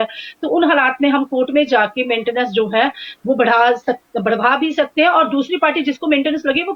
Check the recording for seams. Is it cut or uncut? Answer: uncut